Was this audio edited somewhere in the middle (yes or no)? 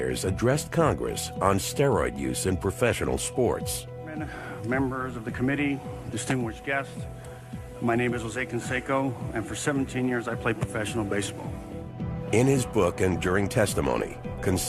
yes